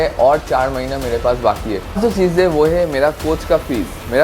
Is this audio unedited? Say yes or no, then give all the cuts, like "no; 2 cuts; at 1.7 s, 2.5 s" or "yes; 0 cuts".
no; 1 cut; at 1.9 s